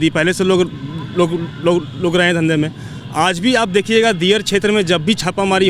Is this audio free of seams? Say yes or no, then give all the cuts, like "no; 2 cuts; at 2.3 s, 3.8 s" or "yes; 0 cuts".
yes; 0 cuts